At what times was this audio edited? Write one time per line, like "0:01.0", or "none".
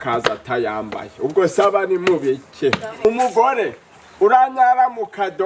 0:03.1